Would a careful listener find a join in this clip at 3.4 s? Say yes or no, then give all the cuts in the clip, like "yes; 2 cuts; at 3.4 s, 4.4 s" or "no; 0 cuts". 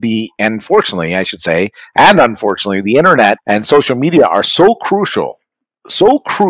yes; 1 cut; at 3.4 s